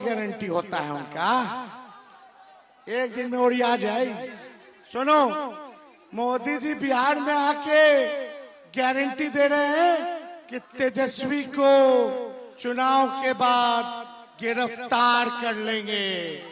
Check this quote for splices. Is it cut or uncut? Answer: uncut